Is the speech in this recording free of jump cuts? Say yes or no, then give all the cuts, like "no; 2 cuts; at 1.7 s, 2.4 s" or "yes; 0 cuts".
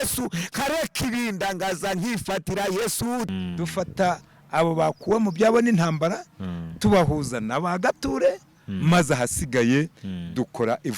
no; 1 cut; at 3.3 s